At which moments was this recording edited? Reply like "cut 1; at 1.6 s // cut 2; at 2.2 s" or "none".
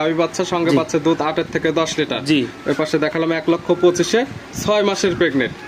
none